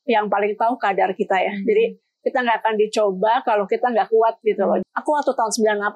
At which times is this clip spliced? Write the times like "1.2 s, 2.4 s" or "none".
4.8 s